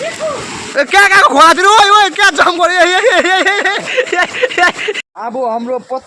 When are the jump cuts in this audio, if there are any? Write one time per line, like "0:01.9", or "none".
0:05.0